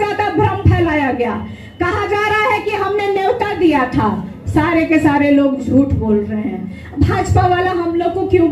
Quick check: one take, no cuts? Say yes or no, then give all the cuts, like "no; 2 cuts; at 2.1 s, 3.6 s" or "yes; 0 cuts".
yes; 0 cuts